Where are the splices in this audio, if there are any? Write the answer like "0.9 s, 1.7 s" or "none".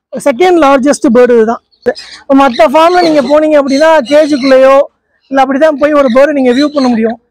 1.8 s